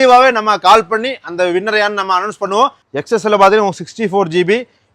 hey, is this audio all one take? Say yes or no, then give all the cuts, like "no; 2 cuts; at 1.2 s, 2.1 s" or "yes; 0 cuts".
no; 1 cut; at 2.8 s